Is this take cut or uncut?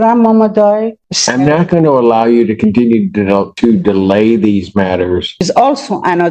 cut